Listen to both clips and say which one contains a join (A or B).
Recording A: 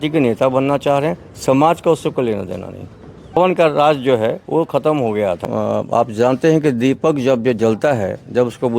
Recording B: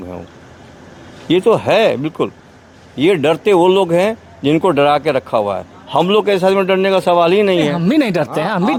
A